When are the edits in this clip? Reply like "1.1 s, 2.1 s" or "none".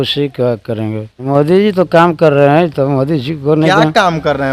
1.3 s